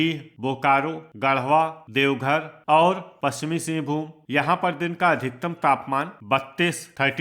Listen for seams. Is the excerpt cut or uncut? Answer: cut